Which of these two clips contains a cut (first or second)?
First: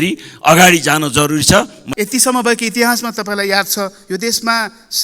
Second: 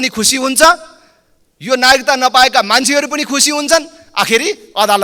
first